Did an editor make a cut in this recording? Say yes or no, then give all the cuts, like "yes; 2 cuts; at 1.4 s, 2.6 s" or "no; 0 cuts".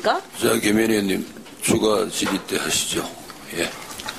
yes; 1 cut; at 1.0 s